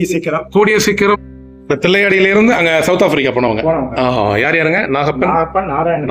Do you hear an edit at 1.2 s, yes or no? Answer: yes